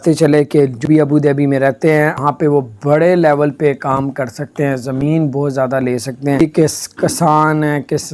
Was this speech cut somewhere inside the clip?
yes; 3 cuts; at 0.8 s, 2.2 s, 6.4 s

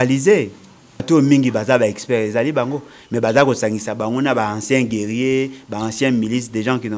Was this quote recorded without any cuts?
no; 1 cut; at 1.0 s

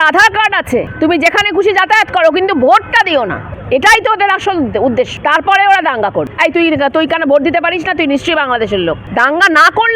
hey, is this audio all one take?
no; 5 cuts; at 0.9 s, 3.5 s, 5.1 s, 6.3 s, 9.0 s

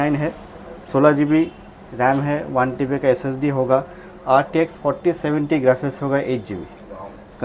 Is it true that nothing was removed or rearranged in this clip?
yes; 0 cuts

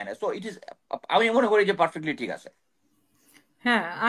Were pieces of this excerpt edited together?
no; 0 cuts

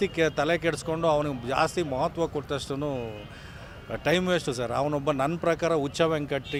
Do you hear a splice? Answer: no; 0 cuts

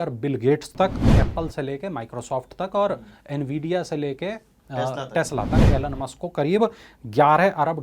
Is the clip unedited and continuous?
no; 2 cuts; at 1.1 s, 5.6 s

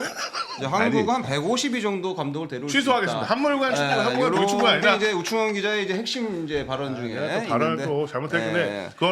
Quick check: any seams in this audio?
no; 0 cuts

